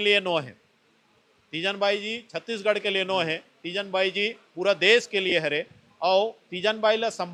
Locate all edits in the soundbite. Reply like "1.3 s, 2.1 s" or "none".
none